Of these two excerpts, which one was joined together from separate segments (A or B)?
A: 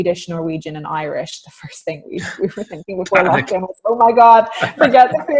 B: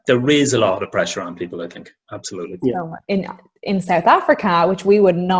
B